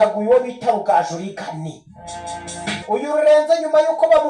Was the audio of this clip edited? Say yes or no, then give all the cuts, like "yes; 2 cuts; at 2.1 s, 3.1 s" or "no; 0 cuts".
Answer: yes; 1 cut; at 2.8 s